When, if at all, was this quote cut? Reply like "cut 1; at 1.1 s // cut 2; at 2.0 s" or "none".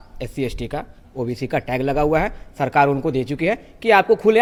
none